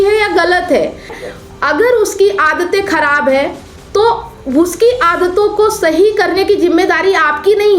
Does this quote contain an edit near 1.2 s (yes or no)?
yes